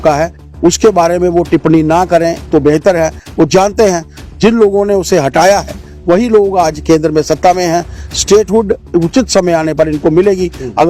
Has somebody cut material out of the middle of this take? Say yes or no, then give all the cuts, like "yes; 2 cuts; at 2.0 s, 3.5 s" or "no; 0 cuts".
no; 0 cuts